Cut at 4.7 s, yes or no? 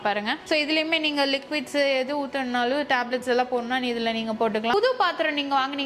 yes